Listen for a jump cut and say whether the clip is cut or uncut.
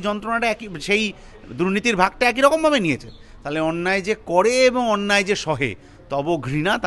uncut